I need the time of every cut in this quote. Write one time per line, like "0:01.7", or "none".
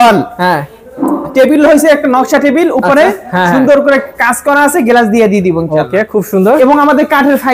none